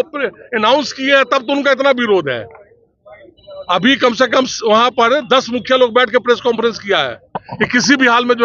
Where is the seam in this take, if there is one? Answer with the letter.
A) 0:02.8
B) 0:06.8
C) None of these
C